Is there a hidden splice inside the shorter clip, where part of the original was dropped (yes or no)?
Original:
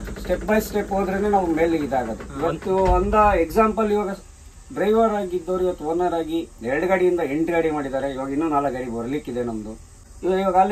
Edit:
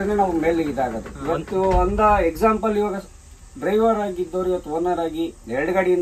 no